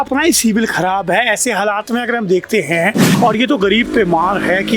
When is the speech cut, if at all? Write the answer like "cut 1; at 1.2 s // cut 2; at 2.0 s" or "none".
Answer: cut 1; at 3.1 s

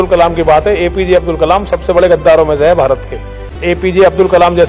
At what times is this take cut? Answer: cut 1; at 3.5 s

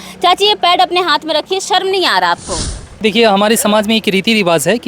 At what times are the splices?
cut 1; at 3.0 s

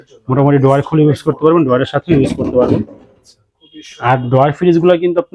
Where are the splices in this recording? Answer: none

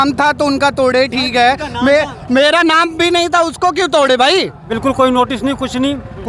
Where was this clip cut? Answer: cut 1; at 4.7 s

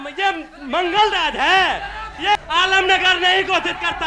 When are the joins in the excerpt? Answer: cut 1; at 2.4 s

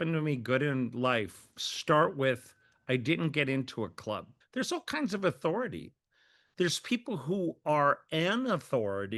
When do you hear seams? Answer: cut 1; at 4.4 s

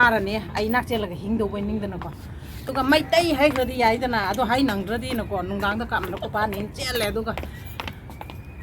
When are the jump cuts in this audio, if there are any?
cut 1; at 2.7 s

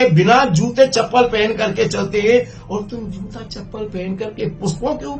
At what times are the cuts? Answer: none

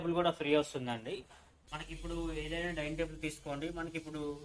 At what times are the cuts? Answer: cut 1; at 1.6 s

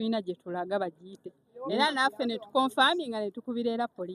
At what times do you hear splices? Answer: none

